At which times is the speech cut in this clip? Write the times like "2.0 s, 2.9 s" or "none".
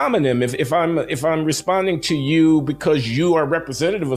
none